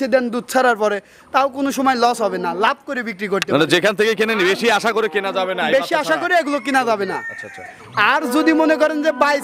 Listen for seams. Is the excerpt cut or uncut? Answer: uncut